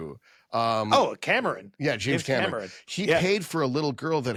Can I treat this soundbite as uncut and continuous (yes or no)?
yes